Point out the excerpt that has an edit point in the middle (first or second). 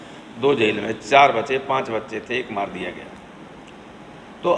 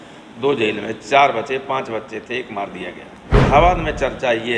second